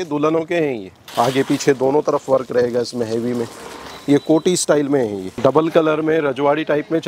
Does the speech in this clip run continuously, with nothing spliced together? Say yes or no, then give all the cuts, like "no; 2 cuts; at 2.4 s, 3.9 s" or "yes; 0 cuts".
no; 2 cuts; at 1.0 s, 5.3 s